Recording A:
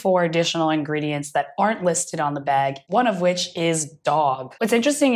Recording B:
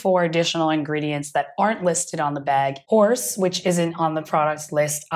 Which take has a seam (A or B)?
B